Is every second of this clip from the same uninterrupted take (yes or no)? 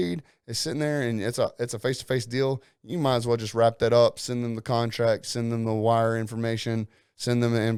yes